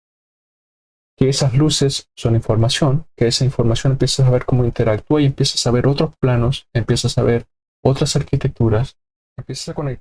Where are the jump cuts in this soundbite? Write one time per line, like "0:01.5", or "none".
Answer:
0:09.0